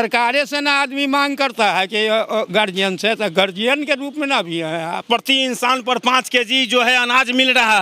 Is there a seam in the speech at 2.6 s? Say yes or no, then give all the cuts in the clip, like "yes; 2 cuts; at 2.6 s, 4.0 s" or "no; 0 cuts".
no; 1 cut; at 5.0 s